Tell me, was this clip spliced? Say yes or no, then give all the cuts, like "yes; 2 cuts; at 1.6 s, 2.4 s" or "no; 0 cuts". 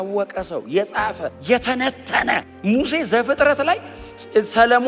yes; 2 cuts; at 1.3 s, 2.5 s